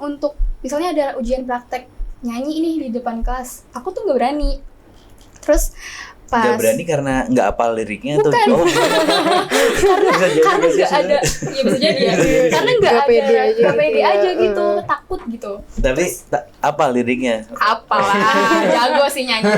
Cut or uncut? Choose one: uncut